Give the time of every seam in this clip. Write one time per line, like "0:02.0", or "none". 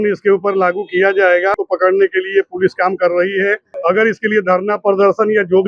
0:01.6
0:03.7